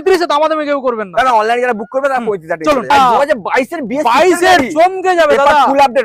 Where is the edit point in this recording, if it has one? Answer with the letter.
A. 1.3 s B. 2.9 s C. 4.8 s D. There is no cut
B